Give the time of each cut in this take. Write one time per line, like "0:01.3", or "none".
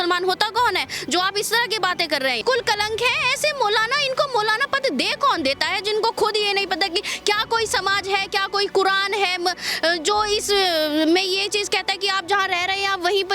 0:02.4